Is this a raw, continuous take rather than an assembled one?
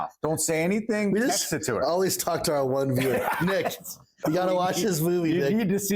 no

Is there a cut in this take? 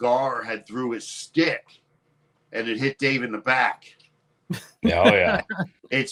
no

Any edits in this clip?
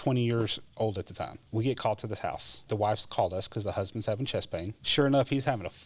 yes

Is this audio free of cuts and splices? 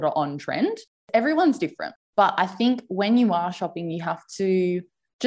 no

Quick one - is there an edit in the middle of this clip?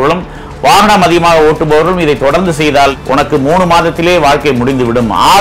yes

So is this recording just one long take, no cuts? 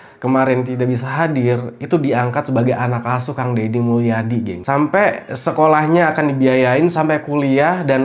yes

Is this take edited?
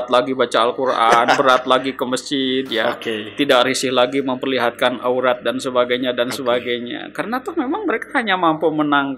no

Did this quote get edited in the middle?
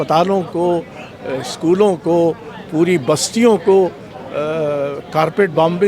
no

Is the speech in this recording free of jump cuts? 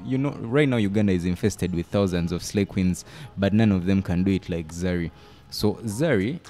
yes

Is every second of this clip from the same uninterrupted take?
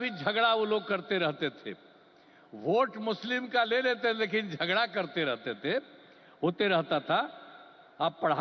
yes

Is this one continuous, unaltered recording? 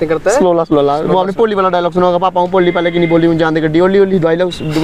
yes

